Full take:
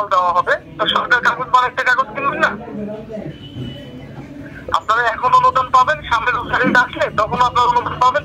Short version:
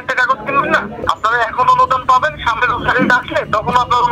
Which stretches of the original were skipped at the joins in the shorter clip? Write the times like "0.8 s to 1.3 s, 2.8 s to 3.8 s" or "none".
2.6 s to 4.6 s